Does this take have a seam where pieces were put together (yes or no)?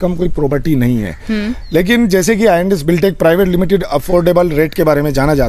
no